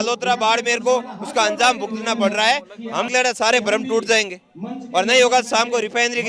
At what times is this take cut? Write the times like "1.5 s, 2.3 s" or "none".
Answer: 3.1 s

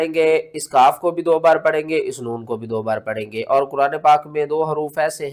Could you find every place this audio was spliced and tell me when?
none

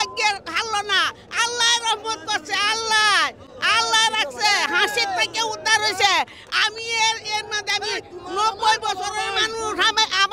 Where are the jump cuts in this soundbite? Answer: none

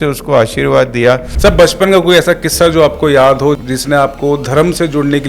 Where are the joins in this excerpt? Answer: 1.3 s, 3.6 s

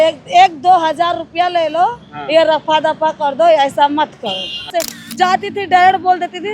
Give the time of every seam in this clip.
4.7 s

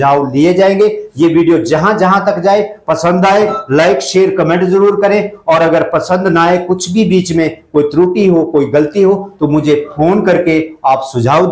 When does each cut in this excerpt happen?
none

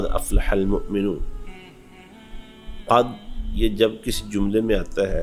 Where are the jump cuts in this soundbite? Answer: none

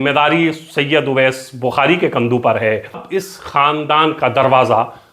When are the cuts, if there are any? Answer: 3.0 s

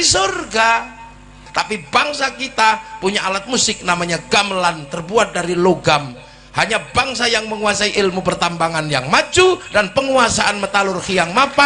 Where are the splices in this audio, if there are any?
1.4 s

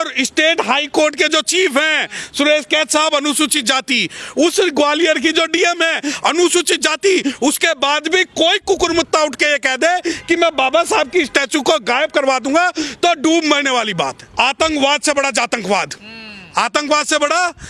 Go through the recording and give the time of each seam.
14.2 s

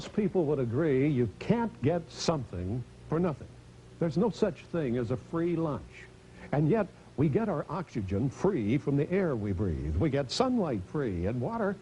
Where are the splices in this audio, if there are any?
2.4 s

